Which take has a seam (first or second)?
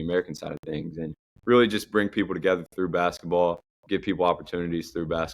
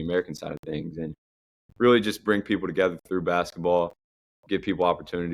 first